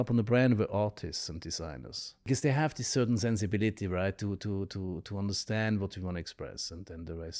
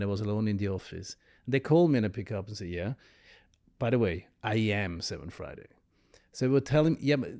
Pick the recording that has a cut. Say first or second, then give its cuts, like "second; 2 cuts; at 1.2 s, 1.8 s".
first; 1 cut; at 2.3 s